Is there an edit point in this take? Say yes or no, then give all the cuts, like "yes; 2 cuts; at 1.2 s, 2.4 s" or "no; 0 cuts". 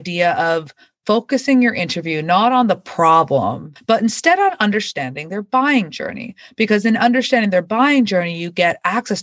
yes; 1 cut; at 3.7 s